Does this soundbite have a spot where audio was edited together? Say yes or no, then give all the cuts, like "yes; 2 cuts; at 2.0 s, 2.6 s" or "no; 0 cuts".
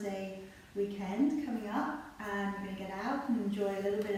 no; 0 cuts